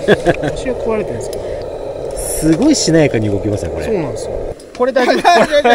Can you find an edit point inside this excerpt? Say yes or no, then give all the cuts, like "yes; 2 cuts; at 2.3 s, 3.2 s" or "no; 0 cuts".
yes; 2 cuts; at 1.6 s, 4.5 s